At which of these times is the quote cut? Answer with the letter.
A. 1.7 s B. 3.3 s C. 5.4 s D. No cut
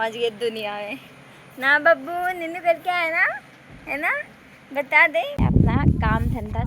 C